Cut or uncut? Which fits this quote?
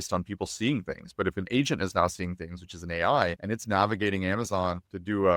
uncut